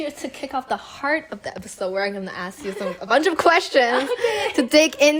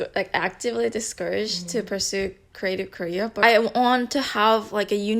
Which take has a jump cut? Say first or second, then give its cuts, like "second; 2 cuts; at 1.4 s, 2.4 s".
second; 1 cut; at 3.3 s